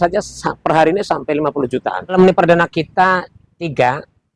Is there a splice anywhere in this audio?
yes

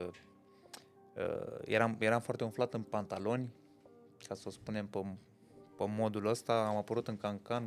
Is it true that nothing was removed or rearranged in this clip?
yes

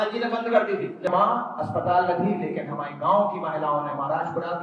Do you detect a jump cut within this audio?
yes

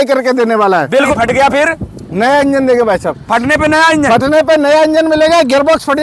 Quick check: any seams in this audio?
yes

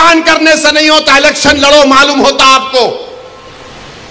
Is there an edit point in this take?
no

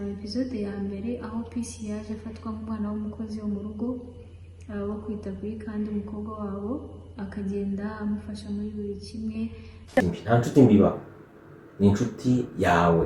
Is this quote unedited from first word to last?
no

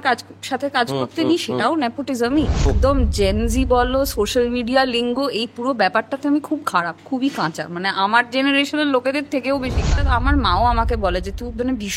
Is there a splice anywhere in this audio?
yes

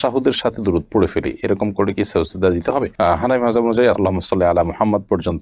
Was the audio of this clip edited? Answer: no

